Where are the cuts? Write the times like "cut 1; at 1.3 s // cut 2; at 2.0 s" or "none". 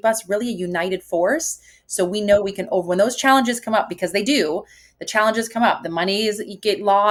none